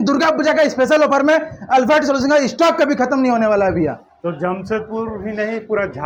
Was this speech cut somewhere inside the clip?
no; 0 cuts

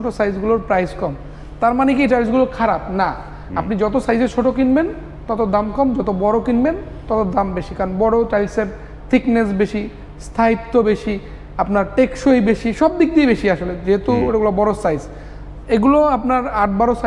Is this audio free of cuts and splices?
yes; 0 cuts

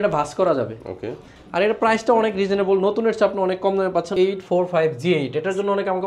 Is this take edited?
yes; 1 cut; at 4.1 s

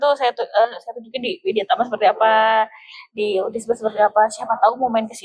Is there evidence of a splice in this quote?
no; 0 cuts

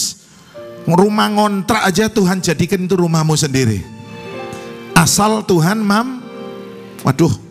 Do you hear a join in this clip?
no; 0 cuts

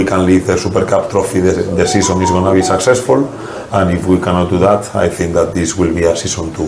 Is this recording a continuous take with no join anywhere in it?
yes; 0 cuts

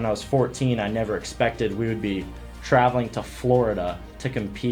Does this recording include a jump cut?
no; 0 cuts

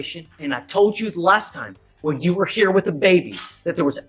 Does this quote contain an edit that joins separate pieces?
no; 0 cuts

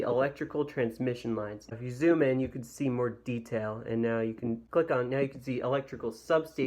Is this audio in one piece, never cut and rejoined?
no; 2 cuts; at 1.7 s, 4.6 s

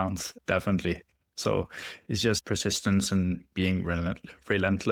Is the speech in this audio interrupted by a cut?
no; 0 cuts

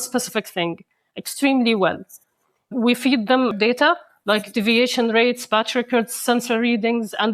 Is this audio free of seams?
yes; 0 cuts

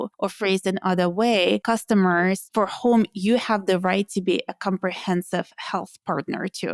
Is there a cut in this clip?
yes; 2 cuts; at 1.6 s, 2.4 s

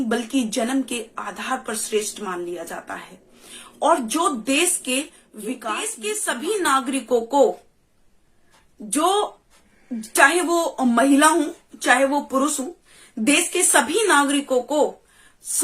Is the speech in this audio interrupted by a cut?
yes; 1 cut; at 6.0 s

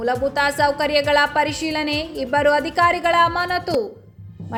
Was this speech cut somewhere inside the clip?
no; 0 cuts

